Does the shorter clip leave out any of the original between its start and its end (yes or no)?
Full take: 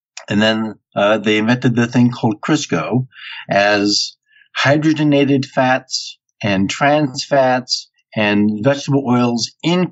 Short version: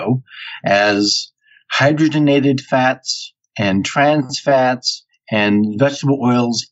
no